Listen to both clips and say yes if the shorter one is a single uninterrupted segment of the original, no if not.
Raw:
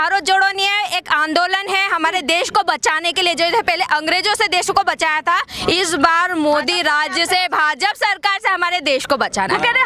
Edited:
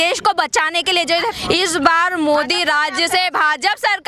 no